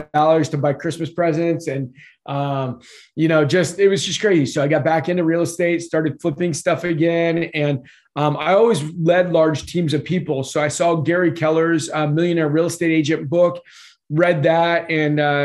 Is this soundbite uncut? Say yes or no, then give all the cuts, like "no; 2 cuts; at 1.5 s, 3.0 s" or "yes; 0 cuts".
yes; 0 cuts